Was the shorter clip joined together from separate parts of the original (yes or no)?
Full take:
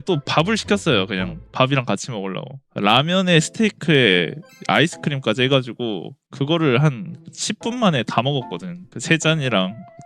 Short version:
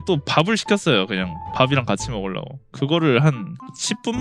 yes